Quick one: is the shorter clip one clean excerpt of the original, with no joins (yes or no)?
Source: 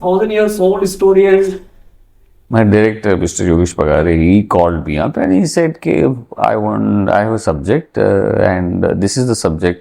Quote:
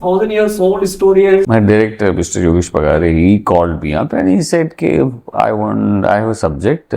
no